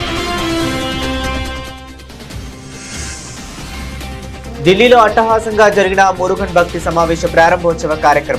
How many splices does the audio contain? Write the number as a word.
two